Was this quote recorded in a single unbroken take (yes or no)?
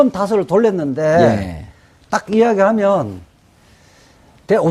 yes